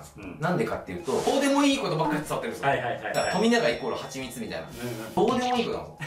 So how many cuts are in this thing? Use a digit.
2